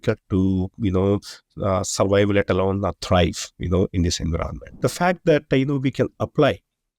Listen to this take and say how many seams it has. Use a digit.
1